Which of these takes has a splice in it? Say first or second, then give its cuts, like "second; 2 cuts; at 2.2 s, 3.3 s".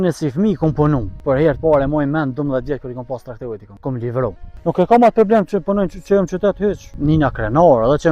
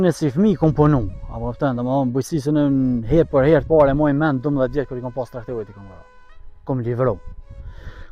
first; 4 cuts; at 1.2 s, 3.7 s, 4.5 s, 6.9 s